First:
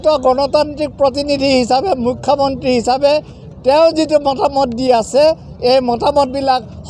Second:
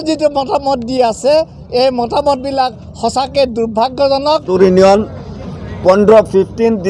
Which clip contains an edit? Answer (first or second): second